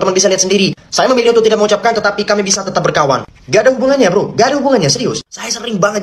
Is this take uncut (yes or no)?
yes